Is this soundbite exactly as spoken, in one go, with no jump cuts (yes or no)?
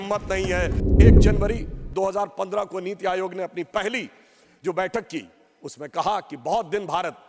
yes